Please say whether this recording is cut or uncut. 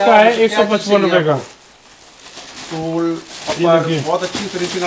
uncut